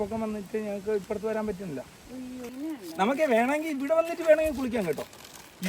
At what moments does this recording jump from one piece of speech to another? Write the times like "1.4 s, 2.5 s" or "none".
2.5 s